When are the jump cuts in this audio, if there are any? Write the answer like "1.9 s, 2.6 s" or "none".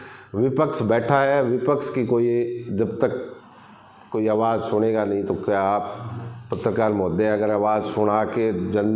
none